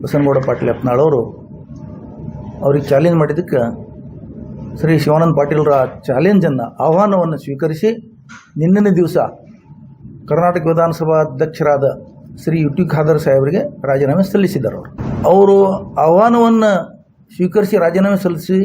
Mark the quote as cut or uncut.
cut